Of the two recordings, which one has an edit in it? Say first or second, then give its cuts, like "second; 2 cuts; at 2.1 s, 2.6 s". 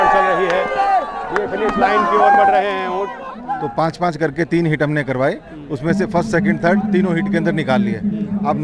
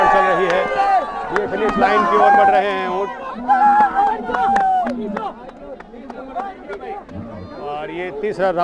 first; 1 cut; at 3.4 s